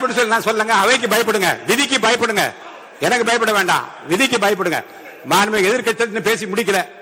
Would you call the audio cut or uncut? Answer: uncut